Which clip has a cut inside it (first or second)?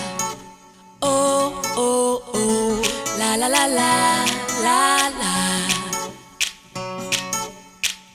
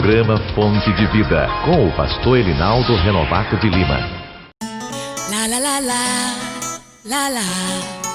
second